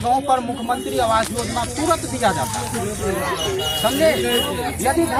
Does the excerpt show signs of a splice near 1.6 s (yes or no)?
no